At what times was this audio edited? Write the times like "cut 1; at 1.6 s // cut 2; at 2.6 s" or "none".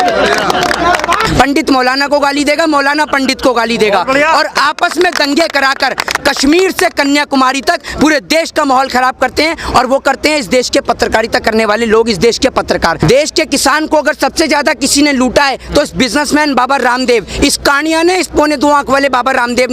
cut 1; at 1.2 s // cut 2; at 13.0 s